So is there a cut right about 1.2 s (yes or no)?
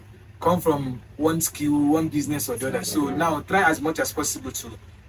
no